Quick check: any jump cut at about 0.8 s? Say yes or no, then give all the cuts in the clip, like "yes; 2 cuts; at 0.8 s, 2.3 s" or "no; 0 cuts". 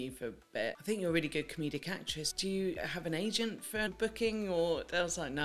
yes; 3 cuts; at 0.8 s, 2.7 s, 3.9 s